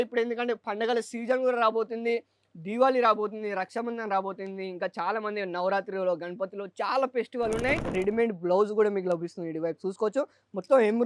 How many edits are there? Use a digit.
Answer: 1